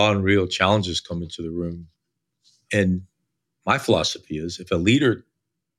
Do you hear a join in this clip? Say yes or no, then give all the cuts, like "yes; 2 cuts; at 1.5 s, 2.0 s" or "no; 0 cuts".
no; 0 cuts